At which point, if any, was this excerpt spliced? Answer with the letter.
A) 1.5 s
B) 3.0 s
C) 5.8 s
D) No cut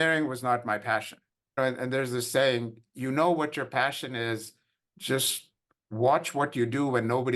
A